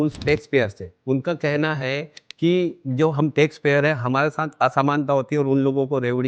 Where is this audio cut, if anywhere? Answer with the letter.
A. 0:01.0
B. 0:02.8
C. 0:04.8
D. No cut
A